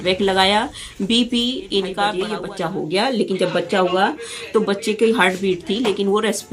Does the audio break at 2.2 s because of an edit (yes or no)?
yes